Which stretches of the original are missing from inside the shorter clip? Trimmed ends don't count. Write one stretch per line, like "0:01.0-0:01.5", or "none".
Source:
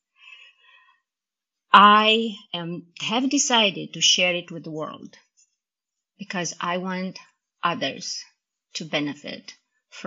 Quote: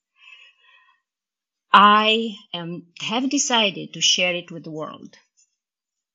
none